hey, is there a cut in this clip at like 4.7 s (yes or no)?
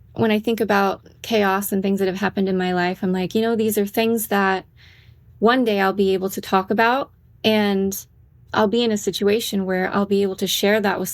no